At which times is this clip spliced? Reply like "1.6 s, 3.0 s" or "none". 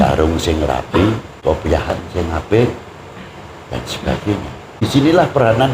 1.3 s, 4.8 s